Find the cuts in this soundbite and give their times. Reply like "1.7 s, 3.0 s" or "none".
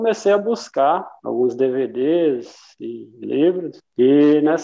1.2 s